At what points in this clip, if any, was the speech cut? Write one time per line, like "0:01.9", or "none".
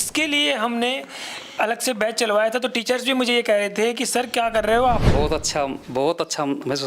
0:05.1